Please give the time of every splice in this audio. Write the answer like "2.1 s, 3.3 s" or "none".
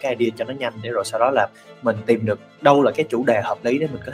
2.9 s